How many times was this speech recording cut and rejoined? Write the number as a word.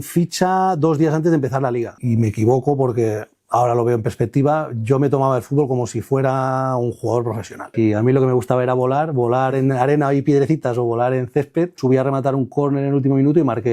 three